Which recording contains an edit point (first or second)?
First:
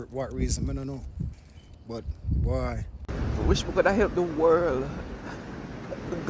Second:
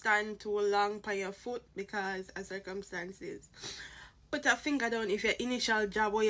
first